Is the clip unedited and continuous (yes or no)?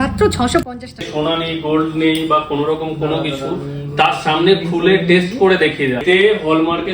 no